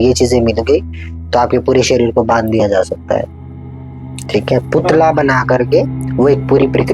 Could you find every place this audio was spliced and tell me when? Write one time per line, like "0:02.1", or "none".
none